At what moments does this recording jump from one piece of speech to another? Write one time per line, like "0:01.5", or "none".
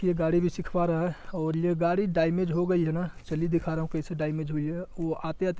none